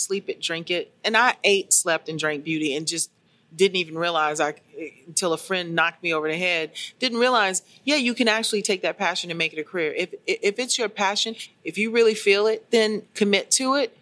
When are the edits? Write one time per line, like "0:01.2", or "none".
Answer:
0:11.3
0:13.1